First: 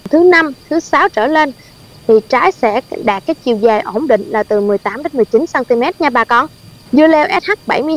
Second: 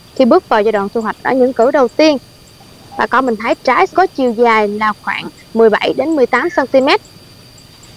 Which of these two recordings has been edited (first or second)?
first